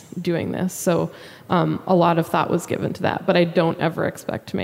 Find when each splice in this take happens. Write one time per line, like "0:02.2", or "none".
none